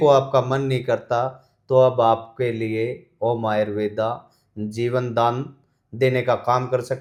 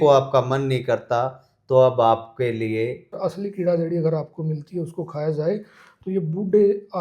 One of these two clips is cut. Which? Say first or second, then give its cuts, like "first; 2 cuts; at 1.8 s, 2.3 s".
second; 1 cut; at 3.2 s